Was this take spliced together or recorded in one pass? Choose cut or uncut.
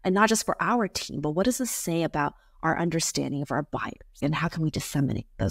cut